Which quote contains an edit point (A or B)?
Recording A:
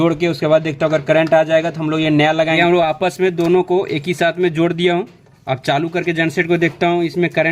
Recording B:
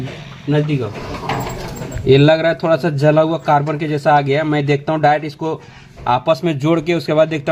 A